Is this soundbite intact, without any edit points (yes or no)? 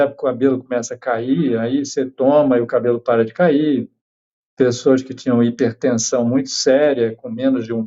yes